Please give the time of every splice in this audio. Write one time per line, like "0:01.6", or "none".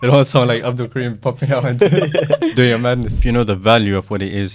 0:02.4
0:03.1